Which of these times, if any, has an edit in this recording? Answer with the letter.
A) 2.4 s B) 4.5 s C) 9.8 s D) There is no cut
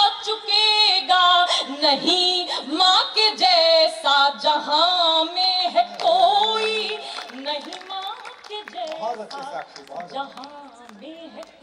D